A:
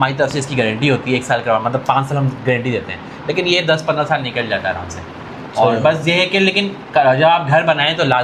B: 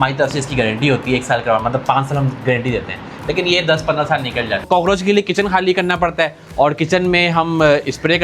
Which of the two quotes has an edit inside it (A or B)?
B